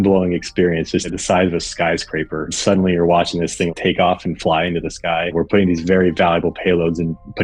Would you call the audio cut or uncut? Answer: cut